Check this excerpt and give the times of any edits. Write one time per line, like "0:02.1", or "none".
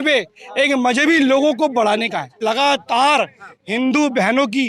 0:02.4